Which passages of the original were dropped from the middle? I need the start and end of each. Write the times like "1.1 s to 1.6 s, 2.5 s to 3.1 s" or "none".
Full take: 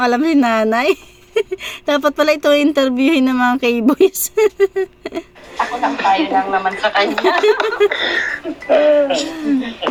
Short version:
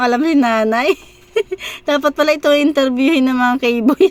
none